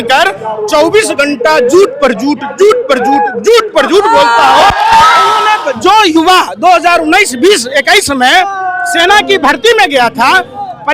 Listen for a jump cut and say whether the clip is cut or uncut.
cut